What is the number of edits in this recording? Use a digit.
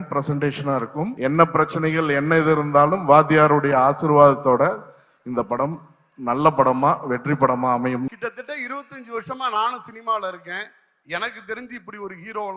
2